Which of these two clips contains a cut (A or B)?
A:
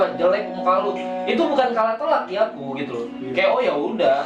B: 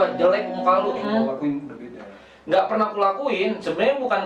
B